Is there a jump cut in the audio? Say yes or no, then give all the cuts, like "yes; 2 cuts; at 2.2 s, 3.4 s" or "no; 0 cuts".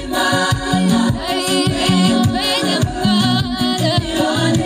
no; 0 cuts